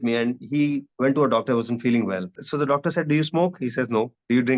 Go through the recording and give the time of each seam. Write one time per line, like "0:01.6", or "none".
0:00.9
0:02.4